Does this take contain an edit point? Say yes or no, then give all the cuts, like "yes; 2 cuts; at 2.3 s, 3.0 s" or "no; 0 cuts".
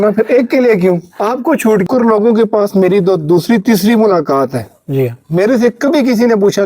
yes; 1 cut; at 1.8 s